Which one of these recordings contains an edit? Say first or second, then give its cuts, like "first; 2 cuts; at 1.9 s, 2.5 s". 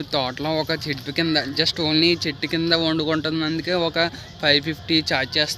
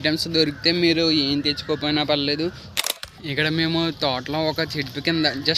second; 1 cut; at 2.7 s